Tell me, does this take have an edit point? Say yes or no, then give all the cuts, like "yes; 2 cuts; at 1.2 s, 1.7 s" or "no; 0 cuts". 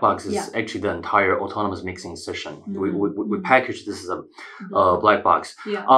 no; 0 cuts